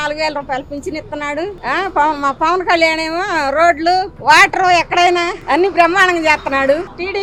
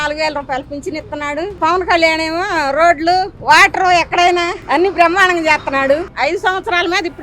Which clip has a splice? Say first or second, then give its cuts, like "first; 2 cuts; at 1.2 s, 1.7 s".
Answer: second; 2 cuts; at 1.6 s, 6.1 s